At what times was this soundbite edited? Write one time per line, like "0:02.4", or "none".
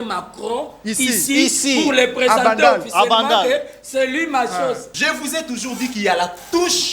0:04.9